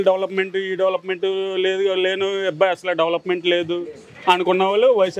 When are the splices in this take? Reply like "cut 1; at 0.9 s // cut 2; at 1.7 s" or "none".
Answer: none